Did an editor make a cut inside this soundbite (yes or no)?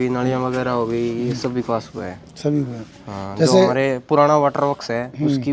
no